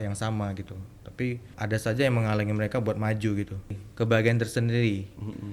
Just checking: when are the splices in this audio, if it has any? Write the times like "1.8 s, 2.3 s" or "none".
1.5 s, 3.7 s

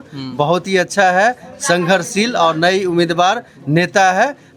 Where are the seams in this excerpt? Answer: none

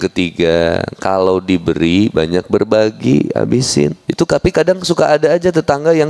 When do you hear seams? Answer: 4.0 s

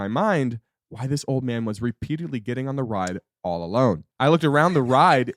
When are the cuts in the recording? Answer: 4.1 s

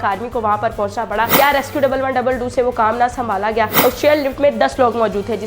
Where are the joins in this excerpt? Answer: 1.3 s, 3.8 s

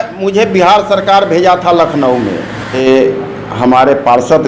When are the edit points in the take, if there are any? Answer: 2.8 s

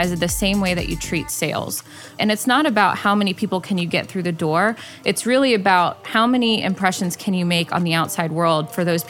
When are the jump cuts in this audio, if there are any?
none

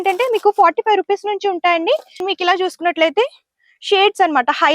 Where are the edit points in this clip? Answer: 2.2 s

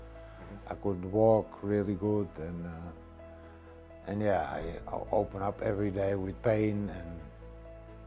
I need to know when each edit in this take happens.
none

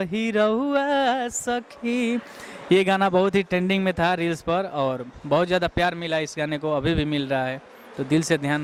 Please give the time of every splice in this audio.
none

